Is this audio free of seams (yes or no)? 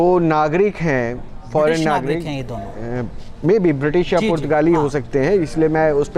yes